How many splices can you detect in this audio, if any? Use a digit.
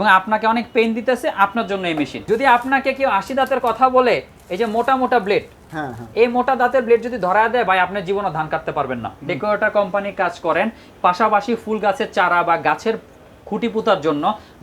2